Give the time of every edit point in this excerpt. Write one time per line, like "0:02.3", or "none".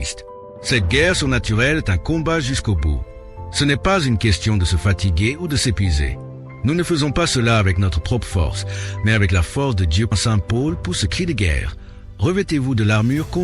0:10.1